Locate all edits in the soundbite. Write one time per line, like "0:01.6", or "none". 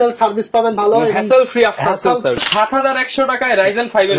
0:02.4